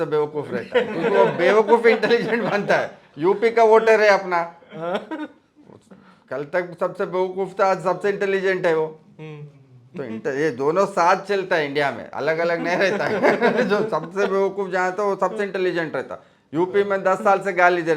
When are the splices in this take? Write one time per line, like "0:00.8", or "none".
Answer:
none